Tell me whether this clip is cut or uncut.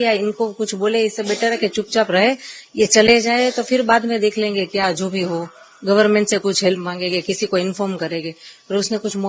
uncut